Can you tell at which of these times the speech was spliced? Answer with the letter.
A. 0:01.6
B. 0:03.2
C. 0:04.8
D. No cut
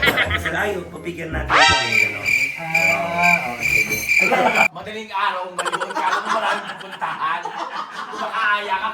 C